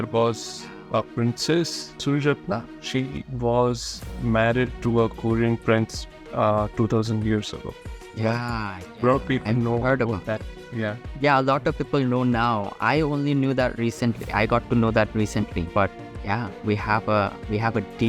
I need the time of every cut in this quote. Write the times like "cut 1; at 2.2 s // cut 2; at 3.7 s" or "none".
none